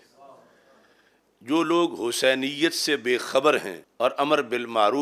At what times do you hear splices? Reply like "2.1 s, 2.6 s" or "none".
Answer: 3.8 s